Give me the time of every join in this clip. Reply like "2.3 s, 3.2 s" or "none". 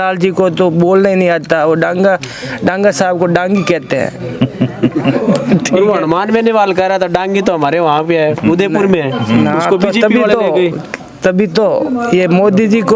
none